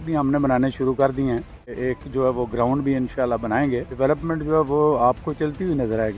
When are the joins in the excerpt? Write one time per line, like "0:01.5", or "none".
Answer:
0:01.8
0:03.9